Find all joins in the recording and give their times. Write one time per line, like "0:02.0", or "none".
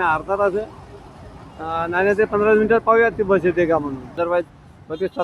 0:04.1